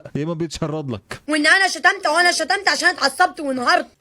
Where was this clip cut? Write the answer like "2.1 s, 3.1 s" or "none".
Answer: 1.2 s